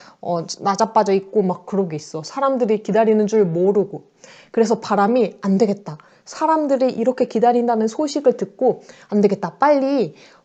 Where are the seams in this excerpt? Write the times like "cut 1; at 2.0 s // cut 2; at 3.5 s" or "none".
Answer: none